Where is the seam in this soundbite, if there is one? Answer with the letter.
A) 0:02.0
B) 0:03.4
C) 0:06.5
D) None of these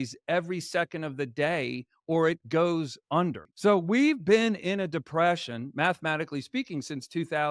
B